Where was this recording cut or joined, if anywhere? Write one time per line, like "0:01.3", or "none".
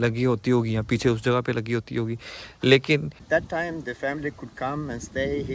0:03.2